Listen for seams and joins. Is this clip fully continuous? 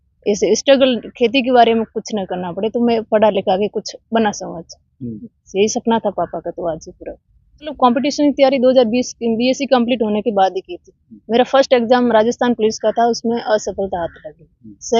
no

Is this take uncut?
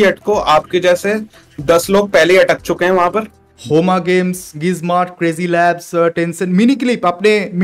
no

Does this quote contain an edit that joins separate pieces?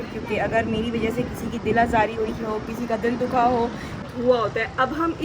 yes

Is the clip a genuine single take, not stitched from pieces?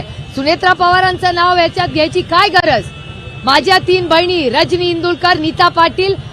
yes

